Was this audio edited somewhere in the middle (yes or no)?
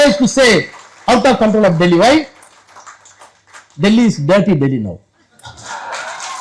no